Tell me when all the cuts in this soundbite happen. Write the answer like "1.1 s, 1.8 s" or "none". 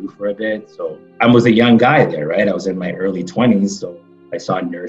1.0 s, 3.8 s